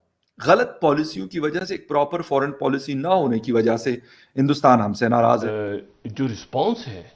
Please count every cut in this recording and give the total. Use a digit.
1